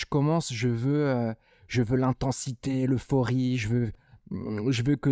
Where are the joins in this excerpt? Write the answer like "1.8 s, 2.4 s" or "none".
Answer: 4.1 s